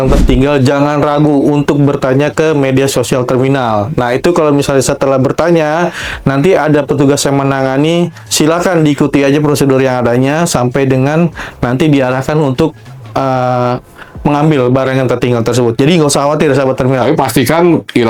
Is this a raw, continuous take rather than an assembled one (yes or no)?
yes